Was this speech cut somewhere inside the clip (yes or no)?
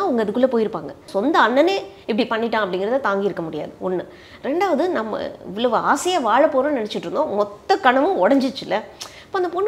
yes